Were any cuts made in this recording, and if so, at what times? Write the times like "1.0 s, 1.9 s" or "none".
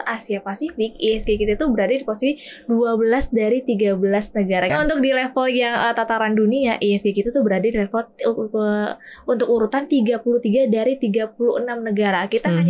4.7 s